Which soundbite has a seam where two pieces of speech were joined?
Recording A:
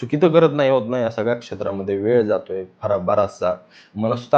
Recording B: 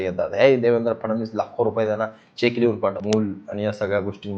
B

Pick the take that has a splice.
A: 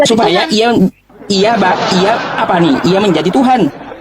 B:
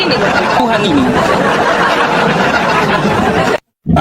B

